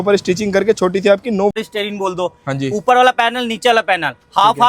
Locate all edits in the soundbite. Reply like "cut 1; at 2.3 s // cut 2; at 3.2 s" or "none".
cut 1; at 1.5 s